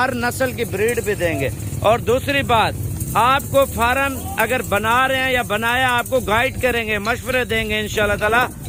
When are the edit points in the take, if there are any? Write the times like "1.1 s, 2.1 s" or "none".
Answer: none